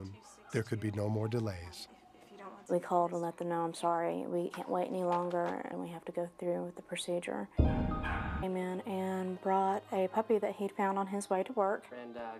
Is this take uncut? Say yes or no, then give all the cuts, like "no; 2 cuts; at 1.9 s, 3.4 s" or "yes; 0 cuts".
yes; 0 cuts